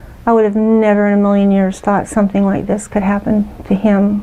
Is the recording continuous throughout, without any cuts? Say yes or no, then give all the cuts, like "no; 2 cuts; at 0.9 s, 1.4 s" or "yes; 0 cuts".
yes; 0 cuts